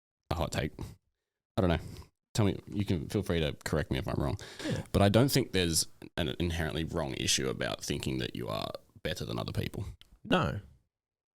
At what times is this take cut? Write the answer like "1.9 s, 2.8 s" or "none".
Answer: none